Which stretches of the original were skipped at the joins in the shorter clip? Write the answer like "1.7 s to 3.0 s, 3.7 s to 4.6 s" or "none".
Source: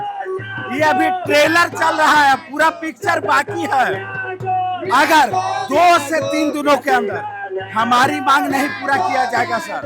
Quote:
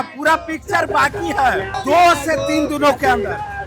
4.1 s to 5.6 s